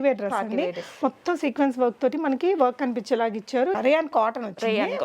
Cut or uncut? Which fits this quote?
cut